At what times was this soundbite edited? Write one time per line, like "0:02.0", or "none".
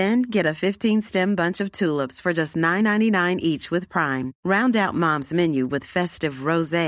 none